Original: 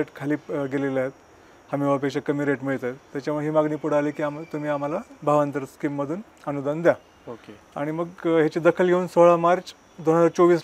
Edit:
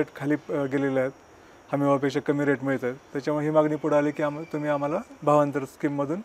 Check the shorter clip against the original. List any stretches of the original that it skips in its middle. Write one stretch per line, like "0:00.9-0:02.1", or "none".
none